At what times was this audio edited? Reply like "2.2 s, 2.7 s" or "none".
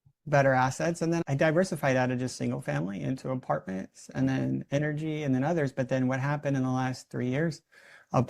1.2 s